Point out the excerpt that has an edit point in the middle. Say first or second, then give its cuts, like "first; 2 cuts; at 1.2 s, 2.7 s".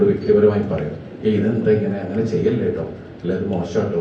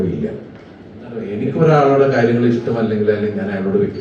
second; 1 cut; at 1.3 s